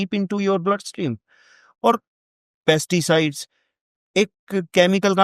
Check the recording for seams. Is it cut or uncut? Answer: uncut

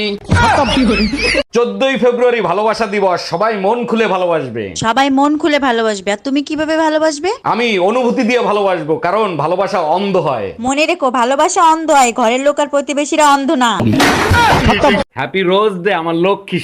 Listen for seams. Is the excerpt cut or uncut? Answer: cut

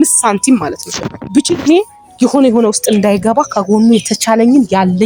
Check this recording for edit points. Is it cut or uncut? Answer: uncut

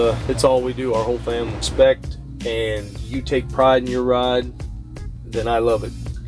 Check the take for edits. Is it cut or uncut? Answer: cut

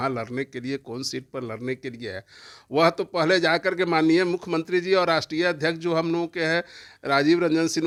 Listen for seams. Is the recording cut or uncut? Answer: uncut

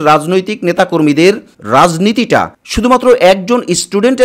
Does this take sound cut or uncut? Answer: uncut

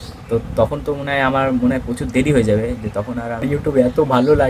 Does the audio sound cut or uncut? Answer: cut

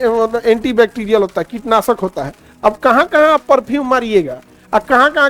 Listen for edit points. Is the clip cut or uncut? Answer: uncut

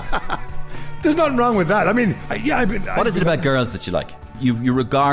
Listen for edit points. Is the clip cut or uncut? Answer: cut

